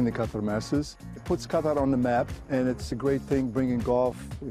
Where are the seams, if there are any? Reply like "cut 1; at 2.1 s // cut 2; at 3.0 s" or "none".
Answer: cut 1; at 1.1 s // cut 2; at 2.8 s